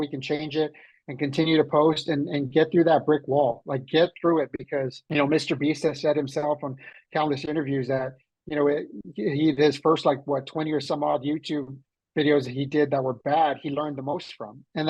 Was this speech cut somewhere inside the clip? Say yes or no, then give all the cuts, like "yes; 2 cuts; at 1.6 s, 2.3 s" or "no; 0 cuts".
yes; 1 cut; at 5.0 s